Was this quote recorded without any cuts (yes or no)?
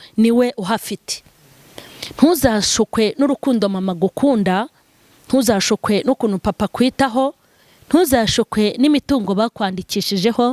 yes